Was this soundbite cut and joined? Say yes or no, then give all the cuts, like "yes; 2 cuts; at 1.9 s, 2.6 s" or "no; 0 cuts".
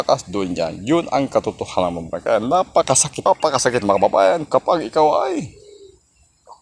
yes; 1 cut; at 3.3 s